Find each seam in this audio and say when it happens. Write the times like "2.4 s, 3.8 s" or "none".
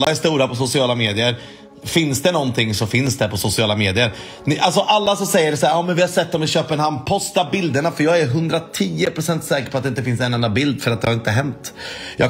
none